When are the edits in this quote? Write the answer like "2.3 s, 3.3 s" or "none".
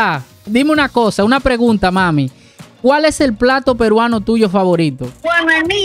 none

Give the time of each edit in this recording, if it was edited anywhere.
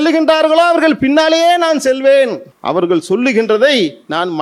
2.5 s

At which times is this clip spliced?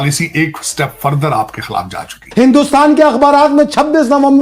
2.2 s

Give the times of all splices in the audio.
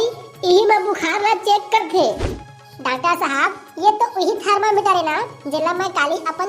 2.2 s

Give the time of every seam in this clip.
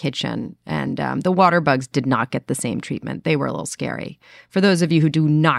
none

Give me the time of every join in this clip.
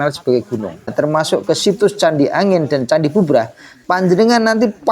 0.9 s

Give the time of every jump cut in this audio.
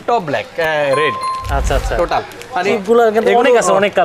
2.8 s

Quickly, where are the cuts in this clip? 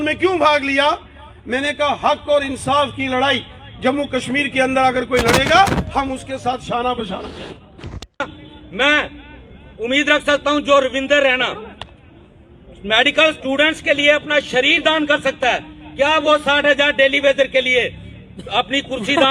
8.4 s

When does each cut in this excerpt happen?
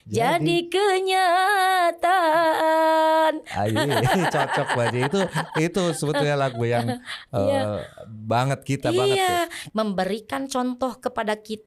9.6 s

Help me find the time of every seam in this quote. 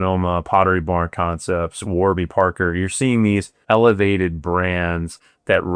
3.5 s

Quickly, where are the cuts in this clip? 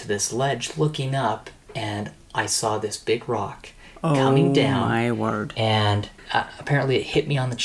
6.1 s

